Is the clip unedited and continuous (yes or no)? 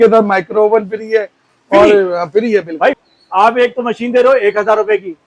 no